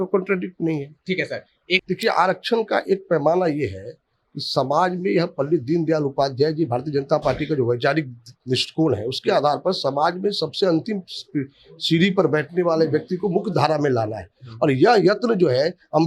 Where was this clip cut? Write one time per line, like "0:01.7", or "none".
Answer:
0:01.8